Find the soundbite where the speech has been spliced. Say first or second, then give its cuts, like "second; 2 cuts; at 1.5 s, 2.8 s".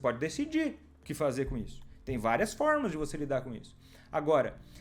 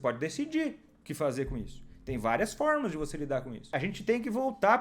second; 1 cut; at 3.7 s